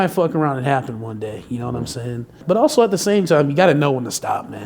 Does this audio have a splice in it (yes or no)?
yes